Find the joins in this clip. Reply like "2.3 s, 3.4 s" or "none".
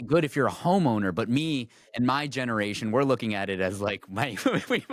none